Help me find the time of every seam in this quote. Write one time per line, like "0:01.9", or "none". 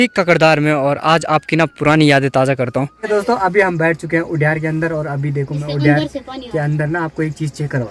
0:02.9

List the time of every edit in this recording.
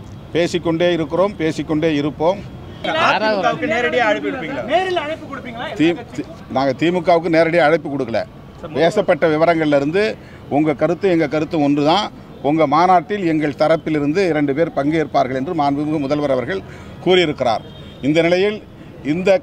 0:02.8

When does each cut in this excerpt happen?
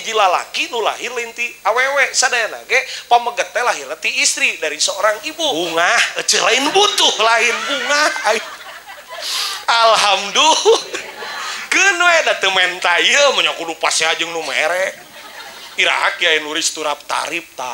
0:05.5

